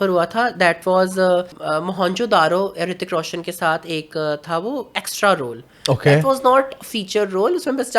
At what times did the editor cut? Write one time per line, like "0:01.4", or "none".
0:01.6